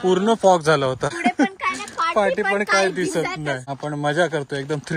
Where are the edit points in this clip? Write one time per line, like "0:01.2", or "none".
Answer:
0:01.2
0:03.7

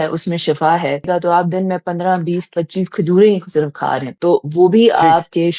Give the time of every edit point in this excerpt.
0:01.0

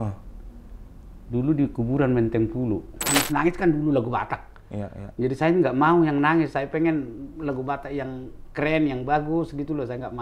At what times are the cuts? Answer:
0:03.0

